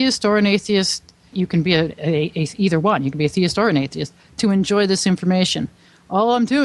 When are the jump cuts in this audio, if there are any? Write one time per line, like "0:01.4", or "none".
0:01.3